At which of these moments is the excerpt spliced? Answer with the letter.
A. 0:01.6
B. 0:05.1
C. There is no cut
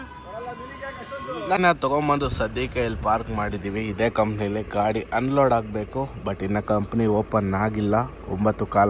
A